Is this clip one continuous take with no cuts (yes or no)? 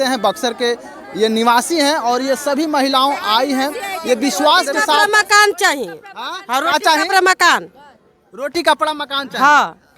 no